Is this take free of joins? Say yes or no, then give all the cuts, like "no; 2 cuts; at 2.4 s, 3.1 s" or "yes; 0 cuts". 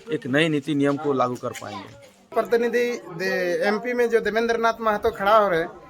no; 1 cut; at 2.3 s